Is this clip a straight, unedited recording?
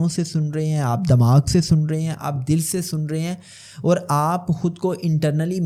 yes; 0 cuts

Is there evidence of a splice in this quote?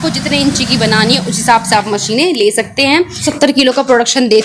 yes; 1 cut; at 3.2 s

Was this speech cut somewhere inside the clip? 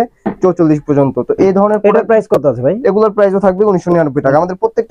no; 0 cuts

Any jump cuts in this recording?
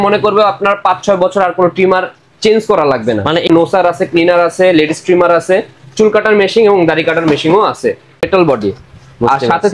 yes; 2 cuts; at 3.5 s, 8.3 s

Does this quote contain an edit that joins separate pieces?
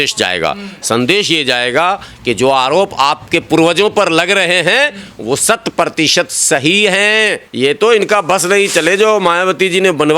yes; 1 cut; at 7.4 s

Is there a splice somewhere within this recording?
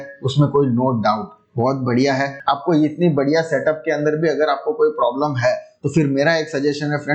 yes; 1 cut; at 2.3 s

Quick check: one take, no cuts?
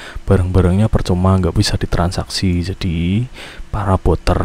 yes; 0 cuts

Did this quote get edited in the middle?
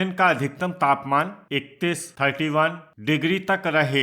yes; 2 cuts; at 1.4 s, 2.9 s

